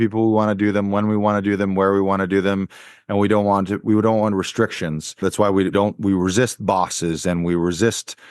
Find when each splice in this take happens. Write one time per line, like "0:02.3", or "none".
0:05.6